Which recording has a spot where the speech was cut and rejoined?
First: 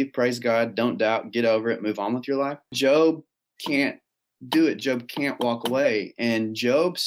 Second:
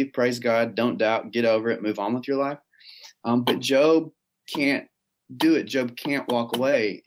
first; 1 cut; at 2.7 s

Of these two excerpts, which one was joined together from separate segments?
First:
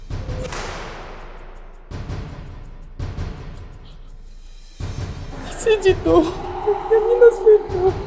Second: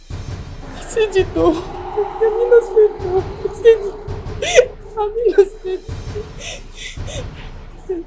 first; 1 cut; at 1.3 s

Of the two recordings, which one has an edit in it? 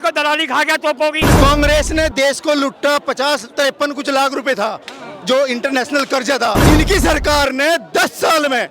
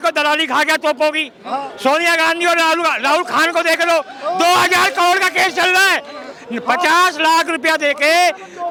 first; 2 cuts; at 1.3 s, 6.6 s

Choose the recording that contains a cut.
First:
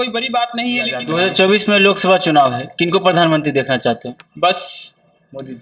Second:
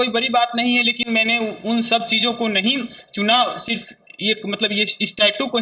first; 1 cut; at 1.0 s

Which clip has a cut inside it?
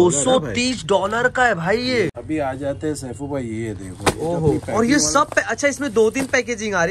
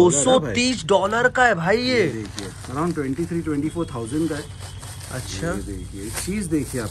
first; 1 cut; at 2.2 s

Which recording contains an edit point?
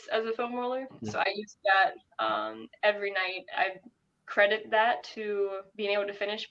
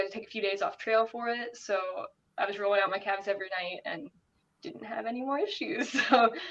first; 2 cuts; at 0.9 s, 3.4 s

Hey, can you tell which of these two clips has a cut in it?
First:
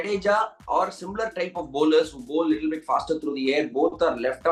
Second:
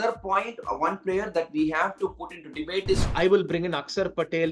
second; 1 cut; at 3.0 s

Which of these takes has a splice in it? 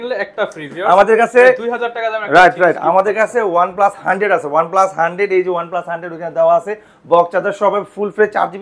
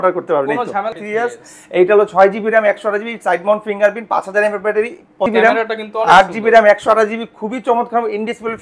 second; 2 cuts; at 1.0 s, 5.3 s

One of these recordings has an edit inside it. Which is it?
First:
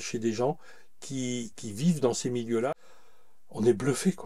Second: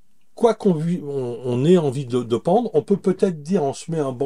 first; 1 cut; at 2.7 s

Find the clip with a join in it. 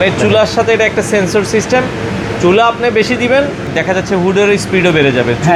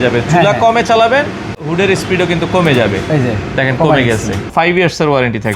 second; 2 cuts; at 1.6 s, 4.5 s

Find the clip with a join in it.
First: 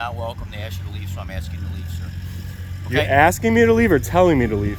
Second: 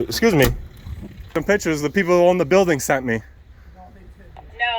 second; 1 cut; at 1.3 s

